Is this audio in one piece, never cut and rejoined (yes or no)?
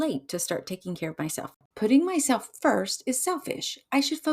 no